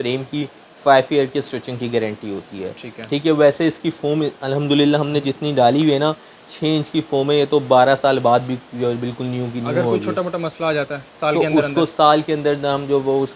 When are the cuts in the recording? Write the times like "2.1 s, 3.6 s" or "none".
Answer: none